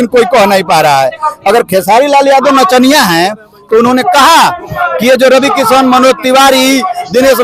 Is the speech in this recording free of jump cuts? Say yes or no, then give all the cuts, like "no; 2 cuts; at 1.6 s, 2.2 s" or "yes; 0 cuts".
yes; 0 cuts